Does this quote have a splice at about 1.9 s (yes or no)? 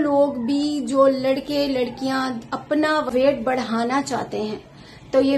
no